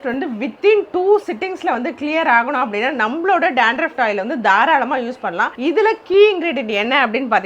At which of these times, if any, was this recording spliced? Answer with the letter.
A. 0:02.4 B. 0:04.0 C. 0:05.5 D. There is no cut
D